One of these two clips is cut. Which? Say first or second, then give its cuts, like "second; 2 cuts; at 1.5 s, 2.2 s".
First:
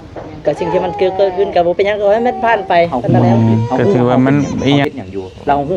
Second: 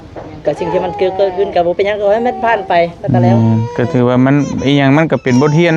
first; 1 cut; at 4.8 s